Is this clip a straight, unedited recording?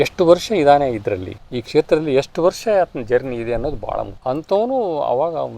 no; 1 cut; at 4.1 s

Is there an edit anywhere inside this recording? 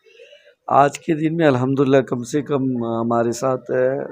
no; 0 cuts

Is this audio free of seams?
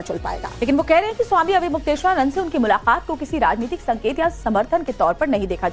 yes; 0 cuts

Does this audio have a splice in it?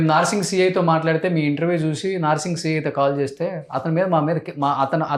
no; 0 cuts

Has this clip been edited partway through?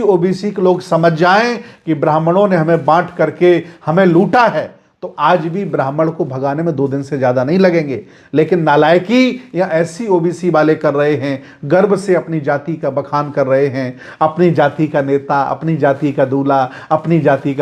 no; 0 cuts

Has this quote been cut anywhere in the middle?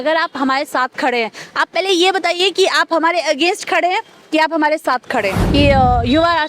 yes; 1 cut; at 5.4 s

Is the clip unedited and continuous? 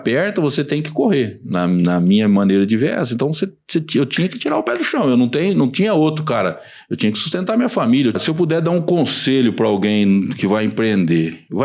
no; 1 cut; at 8.2 s

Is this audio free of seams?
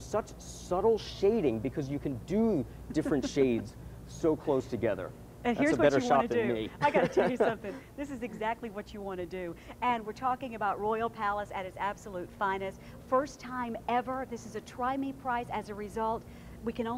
yes; 0 cuts

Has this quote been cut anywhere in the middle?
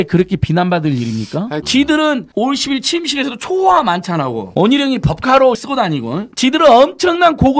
yes; 3 cuts; at 1.6 s, 2.3 s, 5.6 s

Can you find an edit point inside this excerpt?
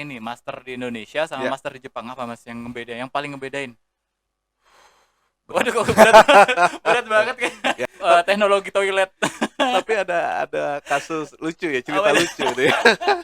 yes; 1 cut; at 7.8 s

